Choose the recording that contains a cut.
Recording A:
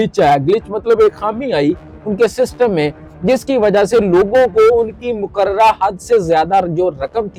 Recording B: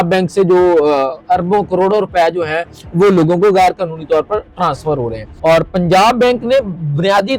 B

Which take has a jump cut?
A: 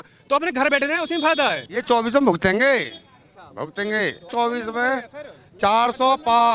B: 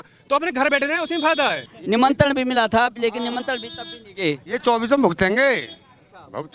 A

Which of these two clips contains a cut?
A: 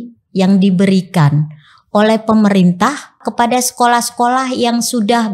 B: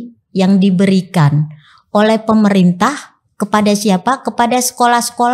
A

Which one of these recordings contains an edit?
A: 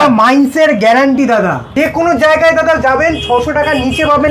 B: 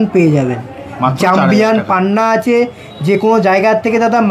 A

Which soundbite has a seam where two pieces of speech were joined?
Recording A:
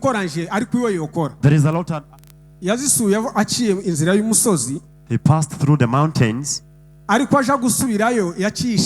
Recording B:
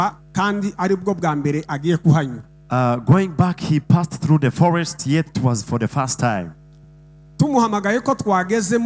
A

